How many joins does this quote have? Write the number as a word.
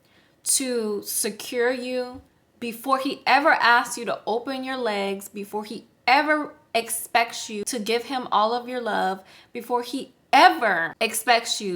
two